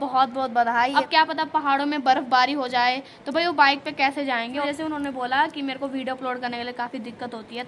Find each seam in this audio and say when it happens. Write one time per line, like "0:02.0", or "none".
0:00.9
0:04.6